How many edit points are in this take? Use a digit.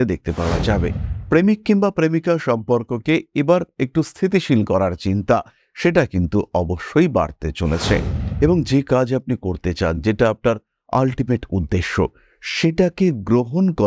2